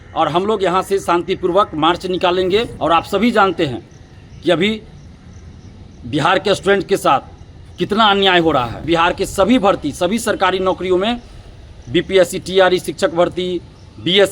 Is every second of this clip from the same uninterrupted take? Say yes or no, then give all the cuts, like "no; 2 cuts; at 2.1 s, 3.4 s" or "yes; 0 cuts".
no; 2 cuts; at 2.7 s, 8.8 s